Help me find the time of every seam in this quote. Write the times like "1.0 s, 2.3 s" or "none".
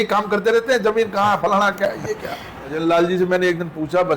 2.8 s